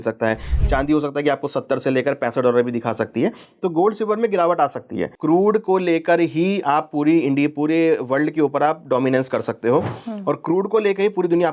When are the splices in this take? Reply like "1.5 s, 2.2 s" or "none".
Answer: 5.0 s